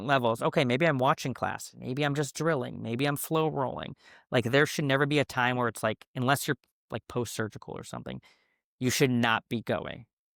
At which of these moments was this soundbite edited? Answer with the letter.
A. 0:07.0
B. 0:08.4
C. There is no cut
C